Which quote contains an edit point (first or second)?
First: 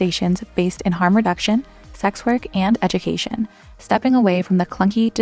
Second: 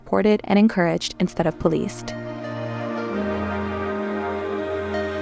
second